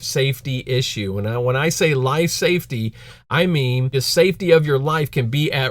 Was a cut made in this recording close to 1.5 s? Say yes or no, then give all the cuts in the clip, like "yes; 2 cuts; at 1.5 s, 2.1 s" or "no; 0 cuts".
no; 1 cut; at 3.9 s